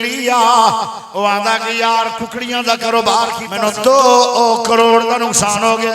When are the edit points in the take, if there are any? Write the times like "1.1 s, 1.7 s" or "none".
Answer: 3.5 s

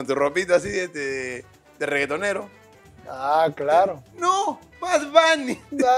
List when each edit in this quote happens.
none

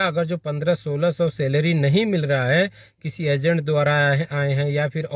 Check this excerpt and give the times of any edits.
none

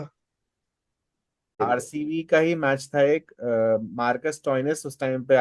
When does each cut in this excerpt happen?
1.6 s

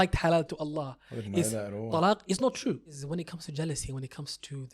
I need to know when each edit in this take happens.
3.1 s

